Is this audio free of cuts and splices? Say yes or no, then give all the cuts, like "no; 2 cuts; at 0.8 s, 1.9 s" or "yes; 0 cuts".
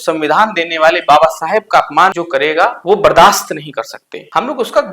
no; 1 cut; at 2.2 s